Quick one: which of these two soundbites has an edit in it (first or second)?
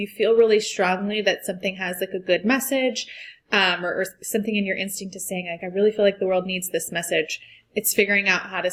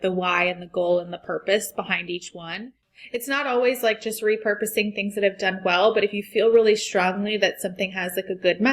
second